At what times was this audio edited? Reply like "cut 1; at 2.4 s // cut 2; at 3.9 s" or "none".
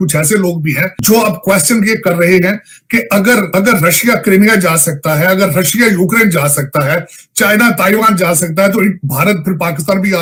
none

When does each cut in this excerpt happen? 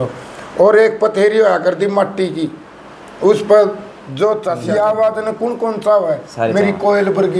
cut 1; at 4.5 s

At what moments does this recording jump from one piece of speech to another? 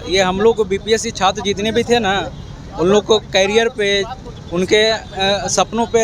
none

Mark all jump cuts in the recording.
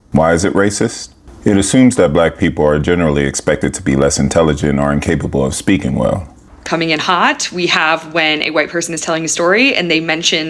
cut 1; at 6.6 s

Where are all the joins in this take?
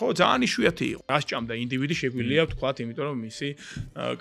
cut 1; at 1.1 s

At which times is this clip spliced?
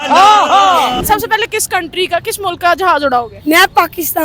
cut 1; at 1.0 s // cut 2; at 3.3 s

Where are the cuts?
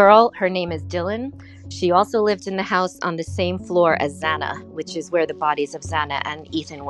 none

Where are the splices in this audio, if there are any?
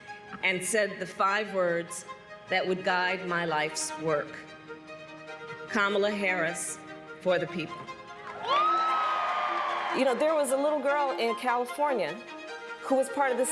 cut 1; at 9.9 s

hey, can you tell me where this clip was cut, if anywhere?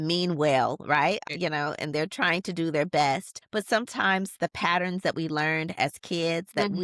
cut 1; at 1.2 s // cut 2; at 3.4 s

